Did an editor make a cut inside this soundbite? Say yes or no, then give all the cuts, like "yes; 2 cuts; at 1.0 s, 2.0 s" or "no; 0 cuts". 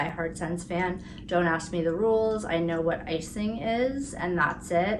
no; 0 cuts